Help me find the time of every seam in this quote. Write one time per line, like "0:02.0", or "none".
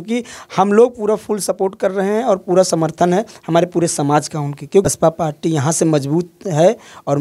0:04.9